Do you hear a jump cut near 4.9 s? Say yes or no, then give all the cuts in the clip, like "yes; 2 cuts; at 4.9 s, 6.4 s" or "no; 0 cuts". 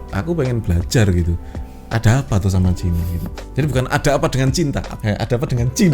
yes; 1 cut; at 4.9 s